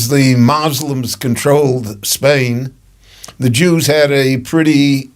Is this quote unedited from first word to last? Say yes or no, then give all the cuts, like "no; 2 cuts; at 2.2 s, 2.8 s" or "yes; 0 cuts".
yes; 0 cuts